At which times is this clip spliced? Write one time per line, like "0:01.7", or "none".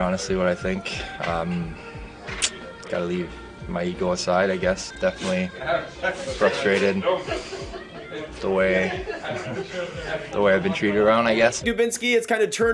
0:04.9
0:11.6